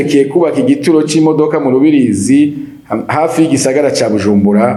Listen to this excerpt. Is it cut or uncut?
uncut